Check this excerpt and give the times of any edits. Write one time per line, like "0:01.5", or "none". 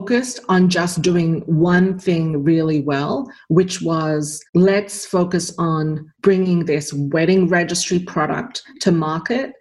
0:04.4
0:06.1